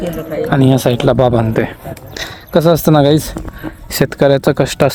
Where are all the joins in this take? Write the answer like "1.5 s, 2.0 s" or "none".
none